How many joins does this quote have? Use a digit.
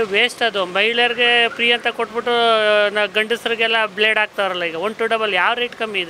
0